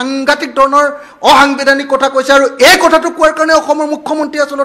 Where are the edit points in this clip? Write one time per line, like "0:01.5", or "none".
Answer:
none

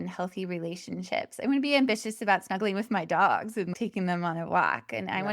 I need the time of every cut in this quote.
0:03.7

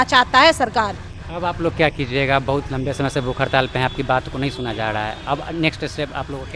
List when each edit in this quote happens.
none

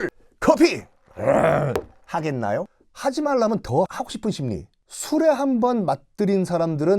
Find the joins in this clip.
0:03.9

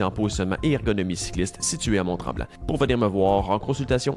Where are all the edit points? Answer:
0:02.5

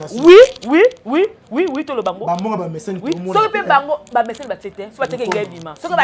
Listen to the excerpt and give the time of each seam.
none

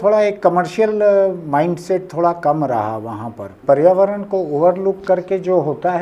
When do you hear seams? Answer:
0:03.5

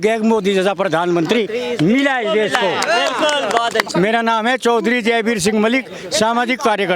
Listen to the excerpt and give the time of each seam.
0:03.9

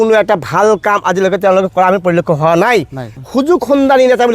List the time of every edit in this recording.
0:03.4

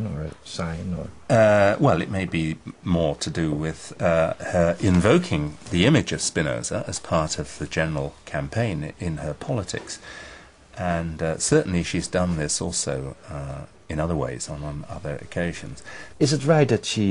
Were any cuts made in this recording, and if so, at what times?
0:09.4

